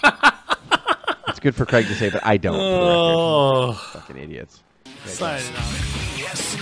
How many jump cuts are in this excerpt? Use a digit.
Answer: 1